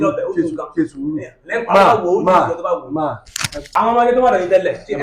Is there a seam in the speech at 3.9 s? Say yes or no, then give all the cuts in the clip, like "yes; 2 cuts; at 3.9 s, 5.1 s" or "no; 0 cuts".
yes; 1 cut; at 3.9 s